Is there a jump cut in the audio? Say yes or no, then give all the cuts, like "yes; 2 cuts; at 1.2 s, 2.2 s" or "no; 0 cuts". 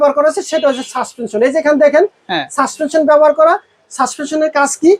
no; 0 cuts